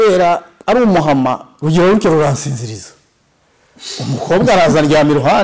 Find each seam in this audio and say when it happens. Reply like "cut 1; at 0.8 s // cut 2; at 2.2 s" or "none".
none